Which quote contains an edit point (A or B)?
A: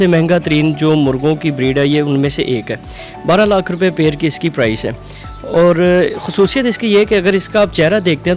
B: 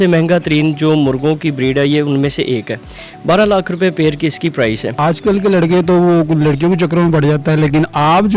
B